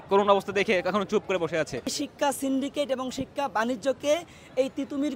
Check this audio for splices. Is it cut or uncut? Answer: cut